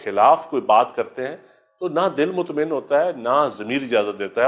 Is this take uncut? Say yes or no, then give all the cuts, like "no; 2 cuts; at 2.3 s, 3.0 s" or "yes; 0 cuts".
yes; 0 cuts